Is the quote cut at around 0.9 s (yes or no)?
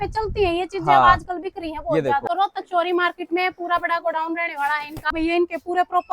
no